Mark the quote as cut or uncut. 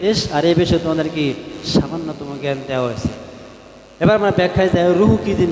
uncut